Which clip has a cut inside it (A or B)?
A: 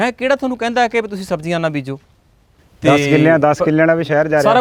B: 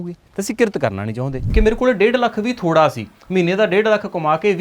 B